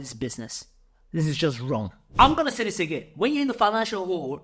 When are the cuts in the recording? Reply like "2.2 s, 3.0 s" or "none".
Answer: 2.0 s

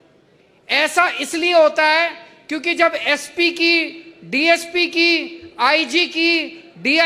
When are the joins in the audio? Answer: none

